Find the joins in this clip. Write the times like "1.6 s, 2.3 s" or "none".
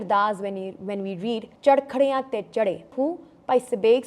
1.5 s, 2.9 s